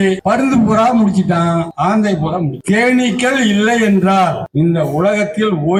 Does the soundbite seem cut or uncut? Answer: uncut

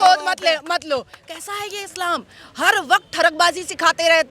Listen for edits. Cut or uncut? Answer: uncut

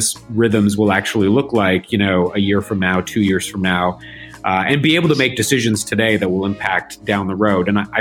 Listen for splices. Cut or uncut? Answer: uncut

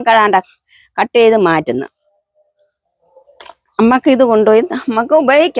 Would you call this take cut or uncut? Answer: uncut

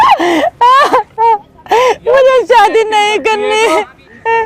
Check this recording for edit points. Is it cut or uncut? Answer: uncut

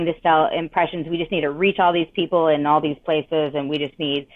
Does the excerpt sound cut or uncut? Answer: uncut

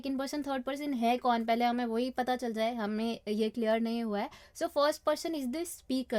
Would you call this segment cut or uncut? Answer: uncut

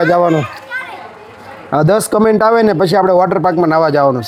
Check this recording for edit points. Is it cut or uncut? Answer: uncut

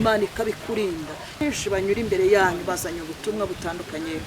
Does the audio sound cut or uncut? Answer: cut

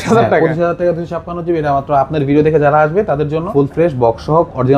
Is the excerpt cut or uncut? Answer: cut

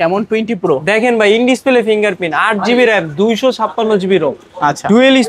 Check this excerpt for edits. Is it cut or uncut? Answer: uncut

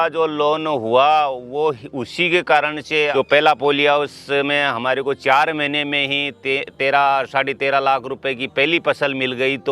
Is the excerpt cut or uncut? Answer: cut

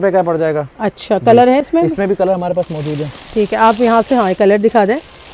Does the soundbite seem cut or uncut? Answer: uncut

